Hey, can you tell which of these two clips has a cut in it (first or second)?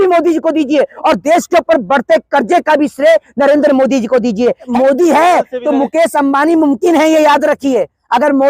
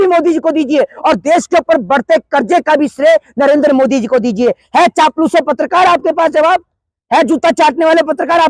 first